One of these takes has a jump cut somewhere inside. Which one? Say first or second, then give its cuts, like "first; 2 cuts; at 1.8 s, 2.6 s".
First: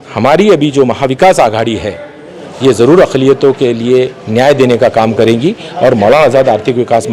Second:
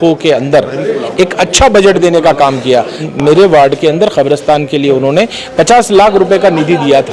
second; 1 cut; at 3.0 s